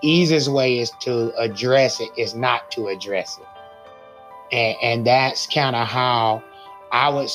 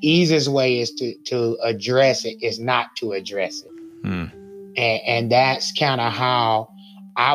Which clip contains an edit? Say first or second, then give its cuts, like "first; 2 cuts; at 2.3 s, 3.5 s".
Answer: first; 1 cut; at 0.9 s